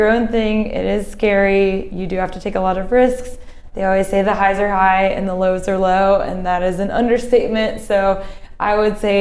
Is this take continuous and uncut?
yes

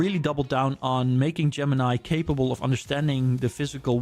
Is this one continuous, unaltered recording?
yes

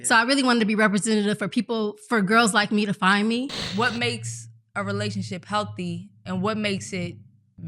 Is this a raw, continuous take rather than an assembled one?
no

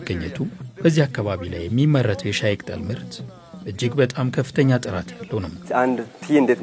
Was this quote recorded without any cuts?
no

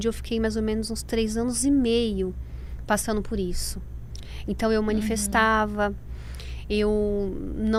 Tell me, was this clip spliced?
no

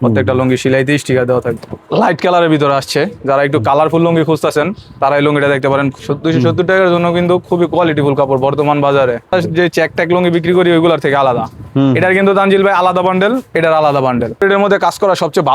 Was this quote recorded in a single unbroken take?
no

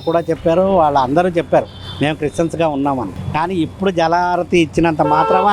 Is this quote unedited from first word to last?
yes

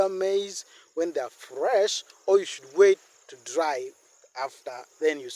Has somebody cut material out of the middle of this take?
no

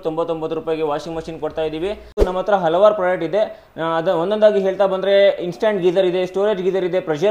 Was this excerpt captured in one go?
no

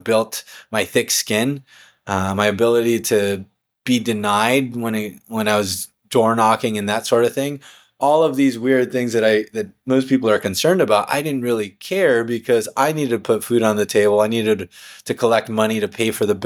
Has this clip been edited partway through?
no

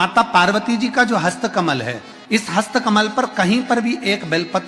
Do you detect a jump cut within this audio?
no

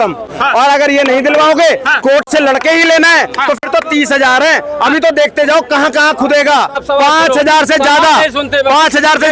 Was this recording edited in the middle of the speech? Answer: yes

